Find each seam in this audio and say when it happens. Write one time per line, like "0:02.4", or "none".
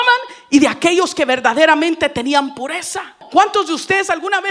0:03.2